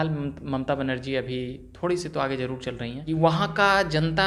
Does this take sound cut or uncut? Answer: cut